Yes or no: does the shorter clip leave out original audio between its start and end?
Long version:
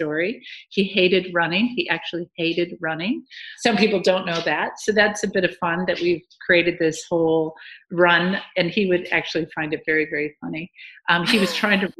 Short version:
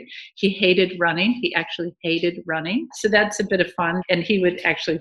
yes